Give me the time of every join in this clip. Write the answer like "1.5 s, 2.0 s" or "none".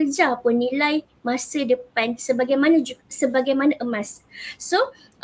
none